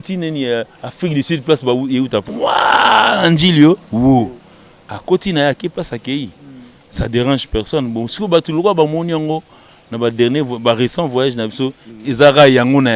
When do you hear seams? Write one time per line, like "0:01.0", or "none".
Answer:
0:02.2